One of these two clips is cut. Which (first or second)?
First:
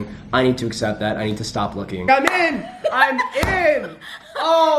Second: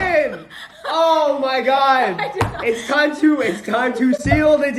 first